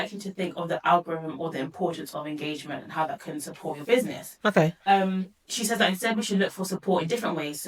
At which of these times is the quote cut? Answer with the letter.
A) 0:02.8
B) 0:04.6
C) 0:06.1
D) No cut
D